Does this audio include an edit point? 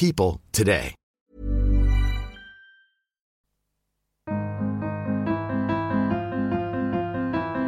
yes; 1 cut; at 3.3 s

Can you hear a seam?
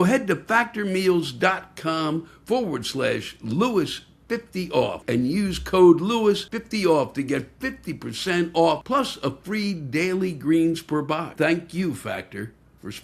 yes; 4 cuts; at 5.0 s, 6.5 s, 8.8 s, 11.3 s

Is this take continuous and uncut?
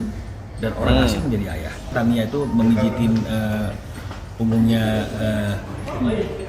no; 1 cut; at 1.9 s

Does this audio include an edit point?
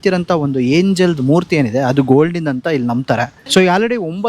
yes; 1 cut; at 3.3 s

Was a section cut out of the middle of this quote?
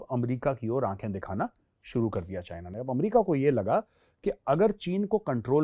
no; 0 cuts

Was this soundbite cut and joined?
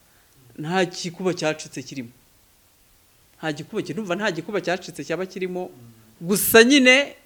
no; 0 cuts

